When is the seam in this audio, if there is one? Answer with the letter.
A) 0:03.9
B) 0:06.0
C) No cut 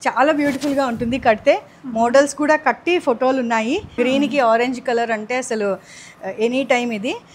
A